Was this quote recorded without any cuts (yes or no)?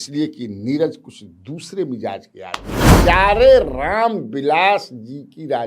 no